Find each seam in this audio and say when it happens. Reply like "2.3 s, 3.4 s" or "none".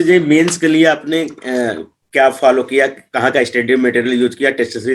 none